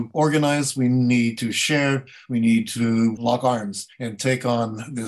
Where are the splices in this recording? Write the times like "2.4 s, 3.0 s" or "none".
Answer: none